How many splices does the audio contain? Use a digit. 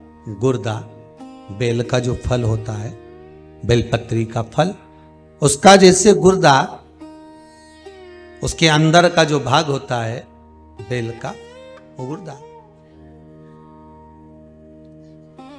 0